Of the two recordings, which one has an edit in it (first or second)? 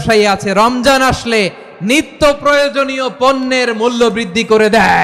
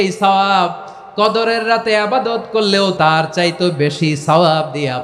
second